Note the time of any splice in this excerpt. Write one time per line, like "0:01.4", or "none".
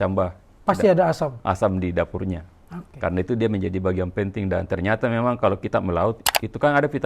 none